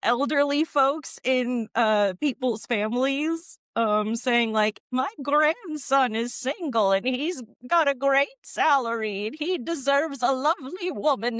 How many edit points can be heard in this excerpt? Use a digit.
0